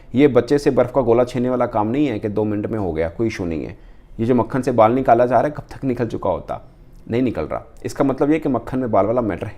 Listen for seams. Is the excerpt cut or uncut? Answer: uncut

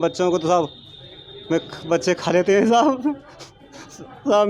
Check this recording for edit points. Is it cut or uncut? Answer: uncut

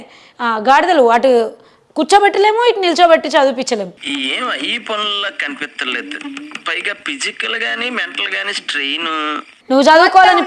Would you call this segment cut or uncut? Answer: cut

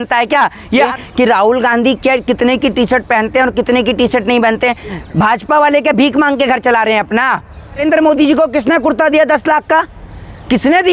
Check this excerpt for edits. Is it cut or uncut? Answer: cut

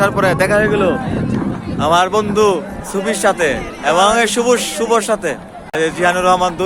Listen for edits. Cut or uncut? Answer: cut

